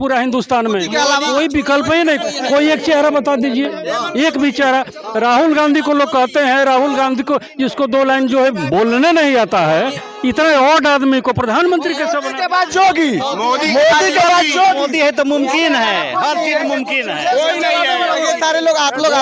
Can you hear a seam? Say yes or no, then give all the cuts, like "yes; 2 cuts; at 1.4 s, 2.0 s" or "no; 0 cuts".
no; 0 cuts